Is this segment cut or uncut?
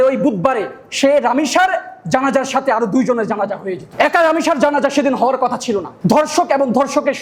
uncut